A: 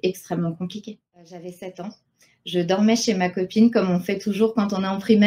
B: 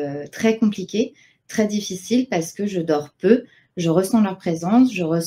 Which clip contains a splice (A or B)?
A